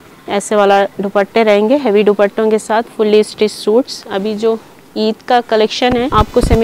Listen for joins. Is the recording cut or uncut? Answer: uncut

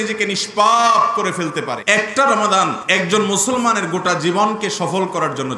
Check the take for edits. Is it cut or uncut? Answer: cut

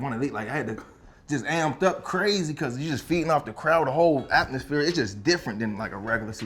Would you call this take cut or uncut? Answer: uncut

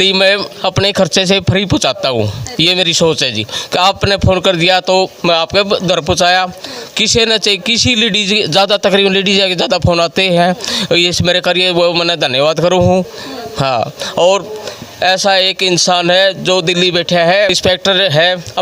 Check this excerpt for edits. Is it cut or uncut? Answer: uncut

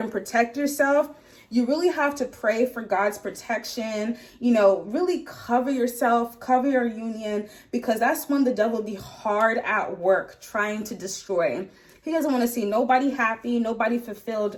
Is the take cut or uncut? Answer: uncut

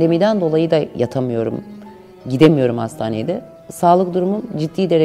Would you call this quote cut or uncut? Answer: uncut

